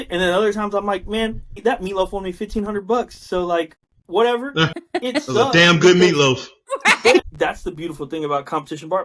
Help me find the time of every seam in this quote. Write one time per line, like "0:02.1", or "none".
0:01.5
0:04.8
0:07.3